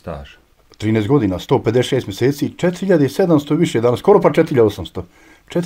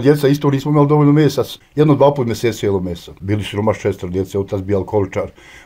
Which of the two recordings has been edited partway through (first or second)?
second